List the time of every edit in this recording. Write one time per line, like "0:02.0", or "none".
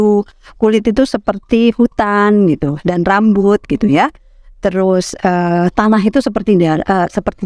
none